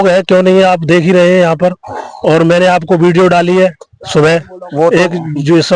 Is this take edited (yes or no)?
no